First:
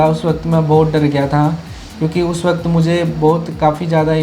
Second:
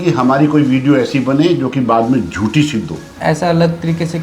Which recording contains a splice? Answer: second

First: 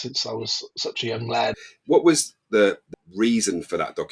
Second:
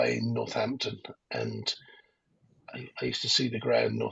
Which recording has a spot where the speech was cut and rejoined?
first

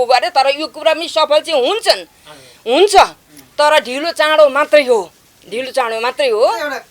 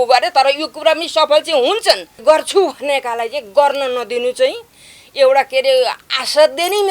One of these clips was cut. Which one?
second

